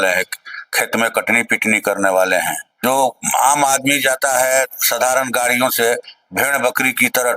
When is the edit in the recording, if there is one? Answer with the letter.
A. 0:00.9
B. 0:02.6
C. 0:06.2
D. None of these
B